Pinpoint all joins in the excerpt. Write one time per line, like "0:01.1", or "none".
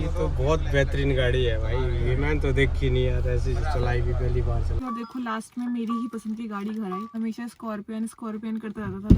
0:04.8
0:07.1